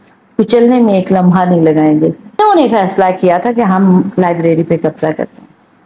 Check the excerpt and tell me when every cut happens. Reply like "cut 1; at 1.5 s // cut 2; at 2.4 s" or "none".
cut 1; at 2.4 s

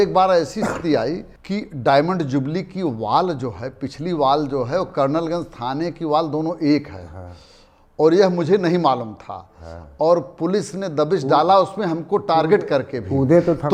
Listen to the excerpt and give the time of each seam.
none

